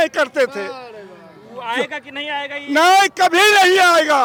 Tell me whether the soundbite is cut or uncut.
uncut